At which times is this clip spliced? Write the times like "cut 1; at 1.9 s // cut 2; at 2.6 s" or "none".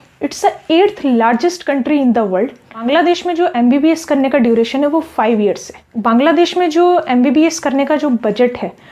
cut 1; at 2.8 s // cut 2; at 5.9 s